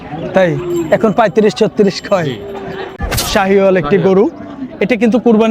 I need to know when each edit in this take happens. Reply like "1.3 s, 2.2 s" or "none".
3.1 s